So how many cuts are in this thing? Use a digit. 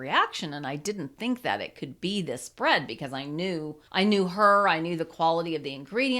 1